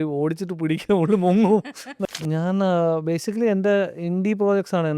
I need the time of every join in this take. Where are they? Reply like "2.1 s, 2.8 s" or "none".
1.8 s